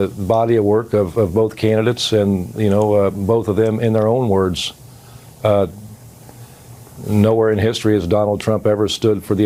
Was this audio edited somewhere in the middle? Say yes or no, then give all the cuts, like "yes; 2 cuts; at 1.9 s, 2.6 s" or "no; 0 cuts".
no; 0 cuts